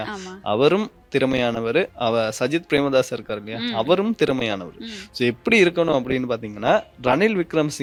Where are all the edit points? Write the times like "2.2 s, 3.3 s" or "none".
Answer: none